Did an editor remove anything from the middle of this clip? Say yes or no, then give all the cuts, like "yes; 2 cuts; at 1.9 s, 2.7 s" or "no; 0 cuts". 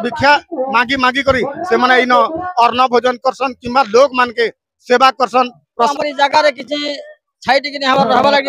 yes; 1 cut; at 5.9 s